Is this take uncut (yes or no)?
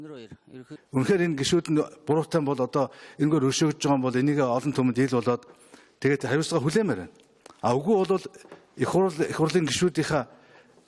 no